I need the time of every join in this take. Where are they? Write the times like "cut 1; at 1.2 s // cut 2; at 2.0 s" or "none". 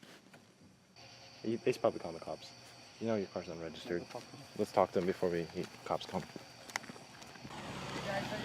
cut 1; at 0.9 s // cut 2; at 7.5 s